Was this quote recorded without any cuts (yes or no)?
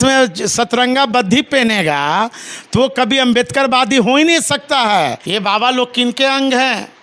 no